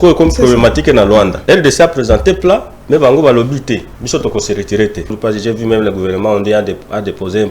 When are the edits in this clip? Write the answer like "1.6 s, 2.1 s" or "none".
1.4 s, 3.9 s, 5.2 s